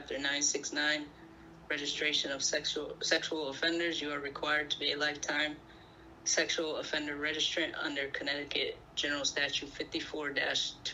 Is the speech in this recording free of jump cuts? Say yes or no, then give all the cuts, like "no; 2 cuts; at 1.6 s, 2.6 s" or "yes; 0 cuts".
yes; 0 cuts